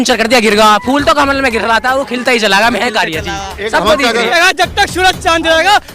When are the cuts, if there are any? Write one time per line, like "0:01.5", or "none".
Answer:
0:04.3